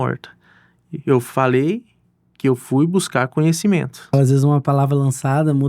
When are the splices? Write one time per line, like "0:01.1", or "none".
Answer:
0:04.1